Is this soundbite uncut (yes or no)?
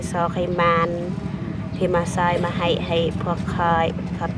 yes